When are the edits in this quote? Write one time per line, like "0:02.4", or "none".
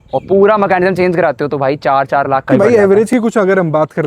0:02.5